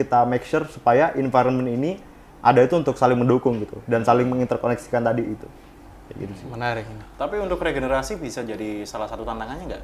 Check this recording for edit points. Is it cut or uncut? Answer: uncut